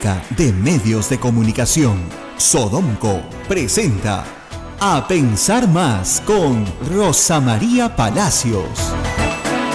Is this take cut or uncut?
uncut